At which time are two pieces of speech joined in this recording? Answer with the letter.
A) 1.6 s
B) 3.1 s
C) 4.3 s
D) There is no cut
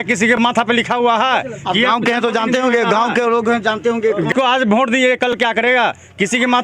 C